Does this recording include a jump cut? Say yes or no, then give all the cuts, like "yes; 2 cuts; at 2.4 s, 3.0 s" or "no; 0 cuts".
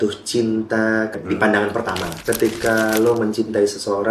yes; 2 cuts; at 1.2 s, 2.1 s